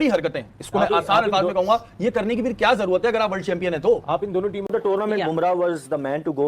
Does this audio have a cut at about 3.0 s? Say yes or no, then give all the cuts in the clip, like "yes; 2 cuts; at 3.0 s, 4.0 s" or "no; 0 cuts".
no; 1 cut; at 4.7 s